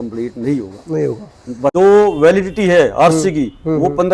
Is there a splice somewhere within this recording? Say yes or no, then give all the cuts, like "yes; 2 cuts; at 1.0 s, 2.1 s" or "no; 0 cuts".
yes; 1 cut; at 1.7 s